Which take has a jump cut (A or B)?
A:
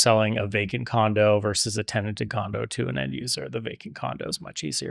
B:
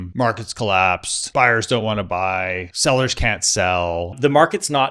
B